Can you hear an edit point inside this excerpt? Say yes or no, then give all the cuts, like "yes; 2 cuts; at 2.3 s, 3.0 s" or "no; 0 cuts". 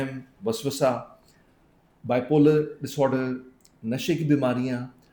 no; 0 cuts